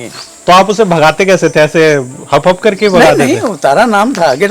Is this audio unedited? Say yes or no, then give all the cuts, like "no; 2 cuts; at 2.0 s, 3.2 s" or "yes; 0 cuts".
yes; 0 cuts